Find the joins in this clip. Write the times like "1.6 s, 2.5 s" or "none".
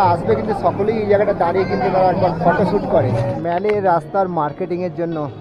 none